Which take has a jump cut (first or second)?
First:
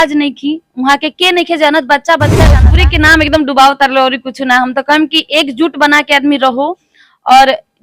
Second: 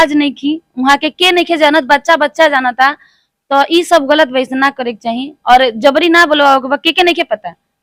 first